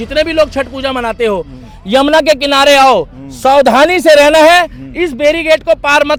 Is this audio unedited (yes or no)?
yes